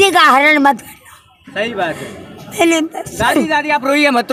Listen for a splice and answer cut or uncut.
uncut